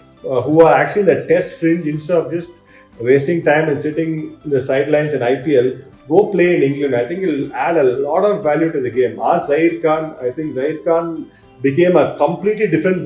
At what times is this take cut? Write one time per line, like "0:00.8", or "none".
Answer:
none